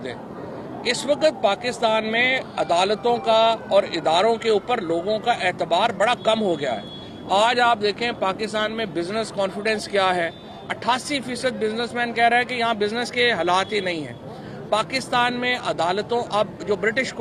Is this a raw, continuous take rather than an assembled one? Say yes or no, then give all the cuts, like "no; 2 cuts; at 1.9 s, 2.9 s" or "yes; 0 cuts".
yes; 0 cuts